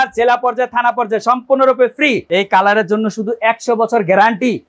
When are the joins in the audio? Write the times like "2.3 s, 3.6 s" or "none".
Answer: 2.2 s